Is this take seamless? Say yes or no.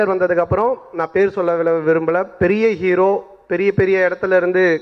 yes